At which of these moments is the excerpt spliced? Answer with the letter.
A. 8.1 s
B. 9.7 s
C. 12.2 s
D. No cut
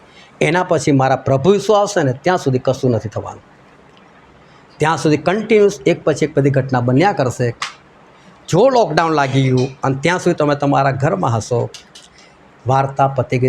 D